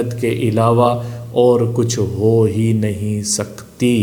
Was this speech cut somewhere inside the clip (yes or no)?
no